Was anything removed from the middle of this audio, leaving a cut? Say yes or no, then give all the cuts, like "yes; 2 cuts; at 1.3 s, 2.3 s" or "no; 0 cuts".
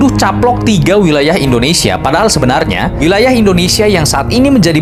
no; 0 cuts